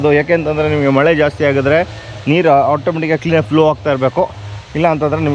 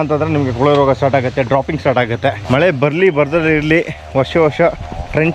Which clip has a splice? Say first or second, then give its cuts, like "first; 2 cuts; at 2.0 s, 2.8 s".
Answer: second; 1 cut; at 2.4 s